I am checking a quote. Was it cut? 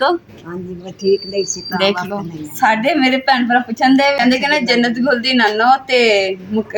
yes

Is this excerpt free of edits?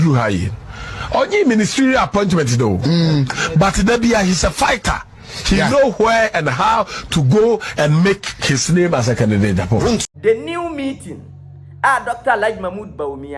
no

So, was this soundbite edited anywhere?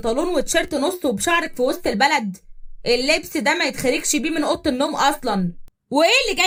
no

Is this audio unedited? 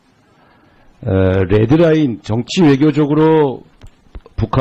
no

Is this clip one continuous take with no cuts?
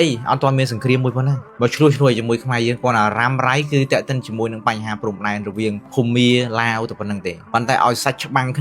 no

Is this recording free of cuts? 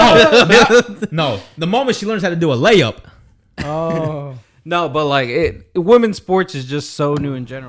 yes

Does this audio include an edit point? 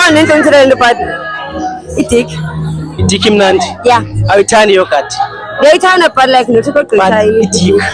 yes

